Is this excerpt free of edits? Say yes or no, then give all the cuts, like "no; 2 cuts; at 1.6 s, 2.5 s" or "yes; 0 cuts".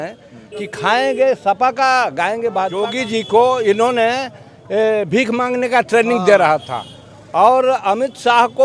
no; 1 cut; at 2.9 s